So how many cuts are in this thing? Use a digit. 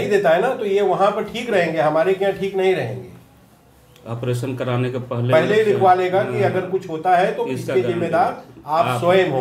0